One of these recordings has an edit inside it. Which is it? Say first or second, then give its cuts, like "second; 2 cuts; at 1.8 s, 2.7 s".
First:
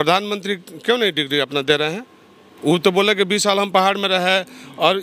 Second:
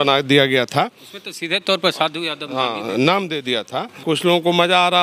second; 1 cut; at 3.9 s